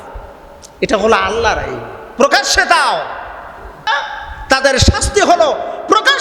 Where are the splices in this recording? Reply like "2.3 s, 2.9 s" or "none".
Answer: 3.9 s